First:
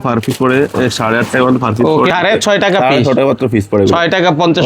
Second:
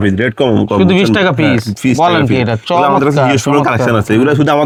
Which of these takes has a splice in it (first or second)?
first